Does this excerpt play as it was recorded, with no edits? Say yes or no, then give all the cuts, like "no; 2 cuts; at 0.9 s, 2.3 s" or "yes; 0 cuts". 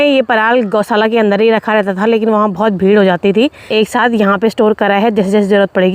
no; 1 cut; at 3.6 s